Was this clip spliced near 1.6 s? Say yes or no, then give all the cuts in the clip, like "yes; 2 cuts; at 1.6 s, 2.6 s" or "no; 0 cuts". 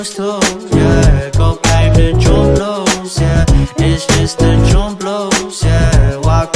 yes; 1 cut; at 1.6 s